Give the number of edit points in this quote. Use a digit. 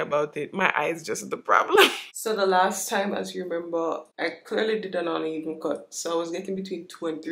2